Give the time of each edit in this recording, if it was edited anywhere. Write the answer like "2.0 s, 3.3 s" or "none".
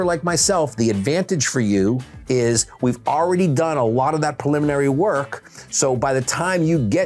none